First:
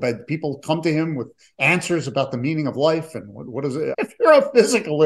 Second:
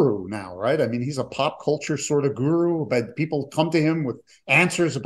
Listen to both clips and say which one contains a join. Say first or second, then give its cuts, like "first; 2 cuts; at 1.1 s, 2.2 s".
first; 1 cut; at 3.9 s